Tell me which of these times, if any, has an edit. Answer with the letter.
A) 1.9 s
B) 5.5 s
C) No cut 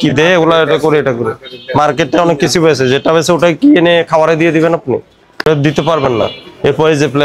B